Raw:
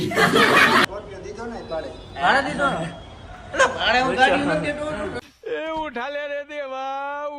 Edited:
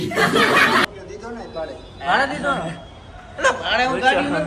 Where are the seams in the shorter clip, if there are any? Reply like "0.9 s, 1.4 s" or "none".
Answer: 1.0 s